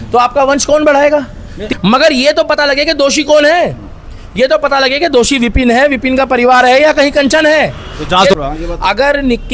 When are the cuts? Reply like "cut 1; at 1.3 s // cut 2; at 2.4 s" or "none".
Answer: cut 1; at 1.6 s // cut 2; at 8.3 s